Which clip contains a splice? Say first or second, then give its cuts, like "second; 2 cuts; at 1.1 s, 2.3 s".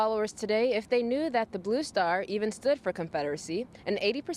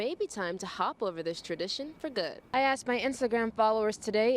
second; 1 cut; at 2.4 s